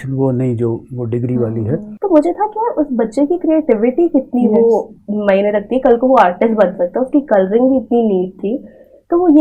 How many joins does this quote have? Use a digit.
1